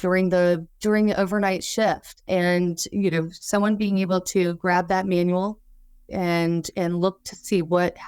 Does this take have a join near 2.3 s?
yes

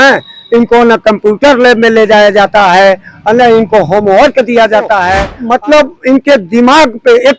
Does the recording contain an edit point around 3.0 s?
no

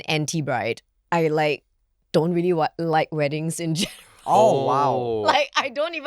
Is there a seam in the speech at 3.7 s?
no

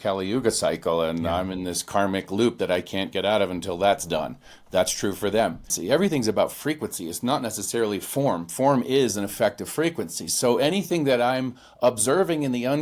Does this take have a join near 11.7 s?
no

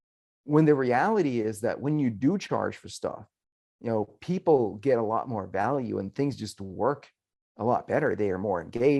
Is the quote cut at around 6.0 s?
no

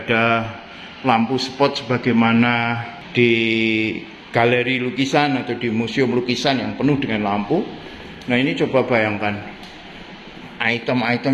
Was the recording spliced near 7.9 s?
no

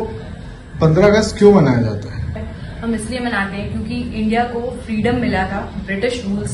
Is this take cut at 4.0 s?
no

